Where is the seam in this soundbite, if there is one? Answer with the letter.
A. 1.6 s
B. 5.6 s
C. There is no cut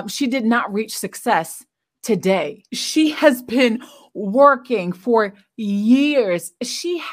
C